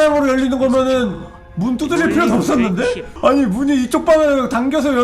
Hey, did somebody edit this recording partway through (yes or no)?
yes